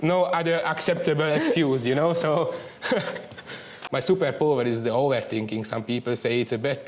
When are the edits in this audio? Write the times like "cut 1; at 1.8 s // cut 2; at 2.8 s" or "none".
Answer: cut 1; at 3.8 s